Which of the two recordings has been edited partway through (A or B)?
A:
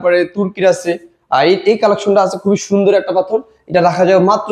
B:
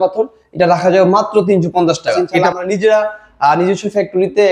B